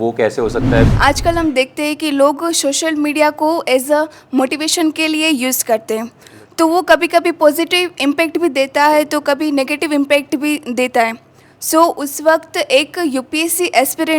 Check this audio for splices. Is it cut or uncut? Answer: cut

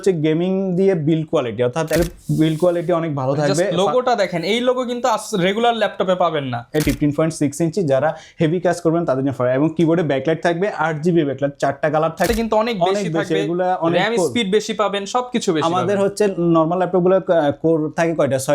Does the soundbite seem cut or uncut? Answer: cut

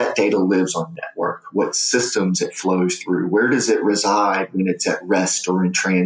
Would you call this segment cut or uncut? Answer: uncut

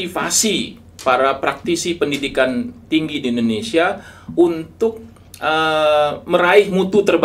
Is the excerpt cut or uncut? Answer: uncut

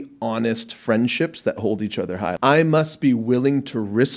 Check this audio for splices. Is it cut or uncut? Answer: cut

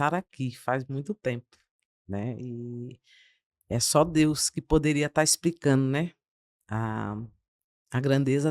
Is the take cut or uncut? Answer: uncut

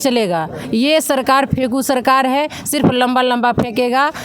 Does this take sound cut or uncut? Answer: uncut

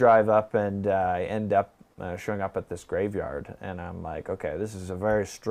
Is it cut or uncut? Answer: uncut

